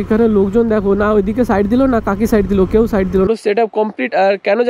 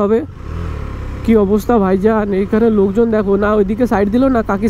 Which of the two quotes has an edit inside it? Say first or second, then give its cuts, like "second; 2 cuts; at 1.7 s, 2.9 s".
first; 1 cut; at 3.3 s